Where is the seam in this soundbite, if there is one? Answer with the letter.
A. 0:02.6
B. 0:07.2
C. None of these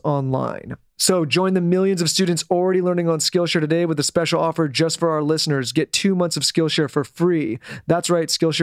C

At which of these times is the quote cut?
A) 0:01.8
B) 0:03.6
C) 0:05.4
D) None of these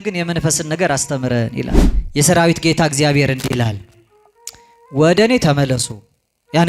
A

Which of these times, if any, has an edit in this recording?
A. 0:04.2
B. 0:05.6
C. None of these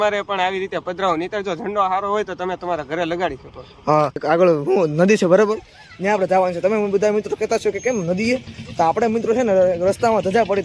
A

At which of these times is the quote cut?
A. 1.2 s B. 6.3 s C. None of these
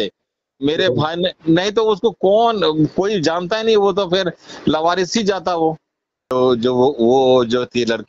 B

